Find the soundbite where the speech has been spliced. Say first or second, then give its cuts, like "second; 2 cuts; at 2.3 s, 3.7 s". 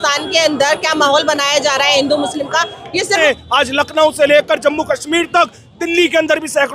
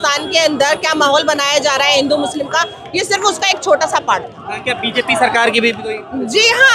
first; 1 cut; at 3.2 s